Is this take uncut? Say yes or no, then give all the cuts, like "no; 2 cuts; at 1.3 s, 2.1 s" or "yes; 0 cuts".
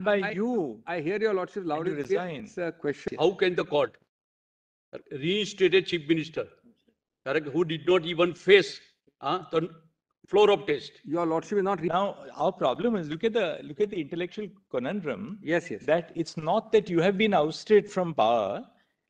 no; 2 cuts; at 3.0 s, 11.9 s